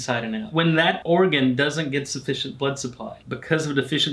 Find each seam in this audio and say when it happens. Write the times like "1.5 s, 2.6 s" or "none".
0.8 s, 3.2 s